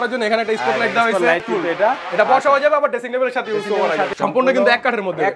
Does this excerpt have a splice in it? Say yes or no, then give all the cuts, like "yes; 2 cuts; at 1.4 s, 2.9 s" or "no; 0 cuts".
yes; 2 cuts; at 1.4 s, 4.1 s